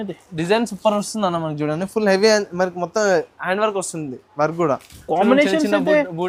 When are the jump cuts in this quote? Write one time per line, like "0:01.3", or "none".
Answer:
none